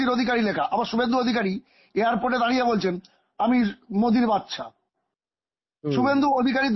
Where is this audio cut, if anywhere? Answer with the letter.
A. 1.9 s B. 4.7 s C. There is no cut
C